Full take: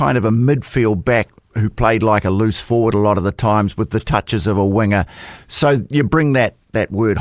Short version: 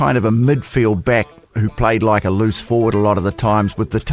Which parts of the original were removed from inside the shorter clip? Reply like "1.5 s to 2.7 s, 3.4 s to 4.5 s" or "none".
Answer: none